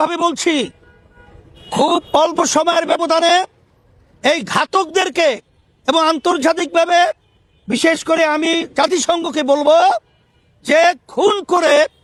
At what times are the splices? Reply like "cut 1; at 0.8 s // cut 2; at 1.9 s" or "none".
none